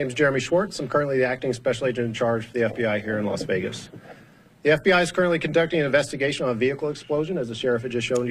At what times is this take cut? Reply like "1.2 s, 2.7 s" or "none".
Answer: none